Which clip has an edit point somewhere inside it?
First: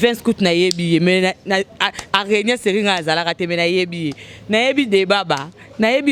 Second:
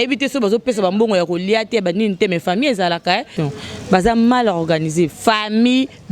second; 1 cut; at 3.3 s

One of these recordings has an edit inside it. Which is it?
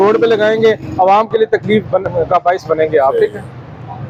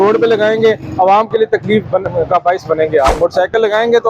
second; 1 cut; at 3.1 s

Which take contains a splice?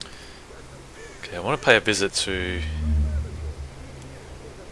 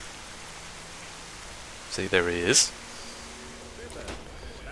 second; 1 cut; at 3.8 s

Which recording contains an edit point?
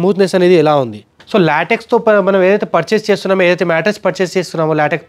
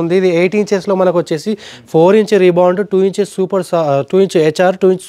first; 1 cut; at 1.2 s

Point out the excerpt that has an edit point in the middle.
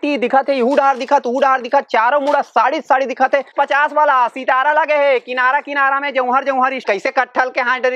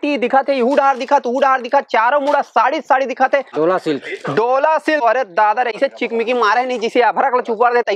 first; 2 cuts; at 3.5 s, 6.8 s

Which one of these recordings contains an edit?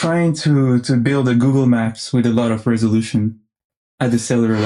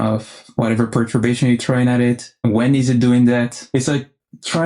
second; 2 cuts; at 2.4 s, 3.6 s

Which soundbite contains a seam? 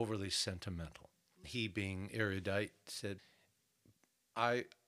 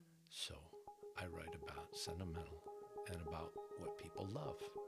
first; 2 cuts; at 1.4 s, 3.2 s

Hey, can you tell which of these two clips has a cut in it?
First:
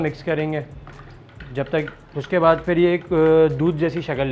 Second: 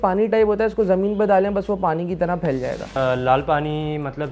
second; 1 cut; at 3.0 s

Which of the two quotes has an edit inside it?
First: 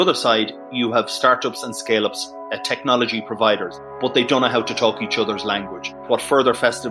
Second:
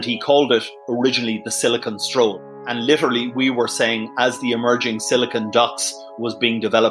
first; 2 cuts; at 3.8 s, 6.1 s

